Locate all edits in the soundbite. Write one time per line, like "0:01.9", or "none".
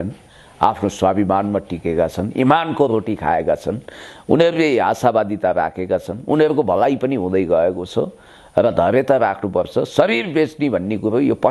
none